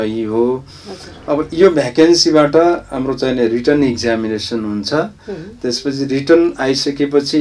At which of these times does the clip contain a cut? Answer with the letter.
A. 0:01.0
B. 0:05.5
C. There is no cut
C